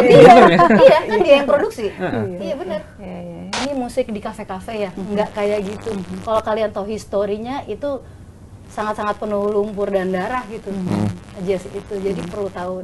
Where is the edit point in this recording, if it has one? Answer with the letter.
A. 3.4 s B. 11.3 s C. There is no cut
A